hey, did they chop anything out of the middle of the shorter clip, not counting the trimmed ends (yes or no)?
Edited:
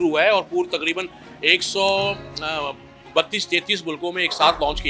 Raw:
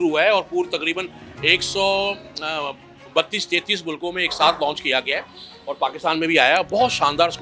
no